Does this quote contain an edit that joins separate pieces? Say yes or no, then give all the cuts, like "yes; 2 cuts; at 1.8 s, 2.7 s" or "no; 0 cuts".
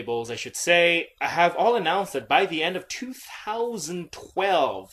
yes; 1 cut; at 1.7 s